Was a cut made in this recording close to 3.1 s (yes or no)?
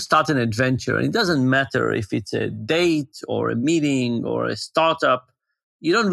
no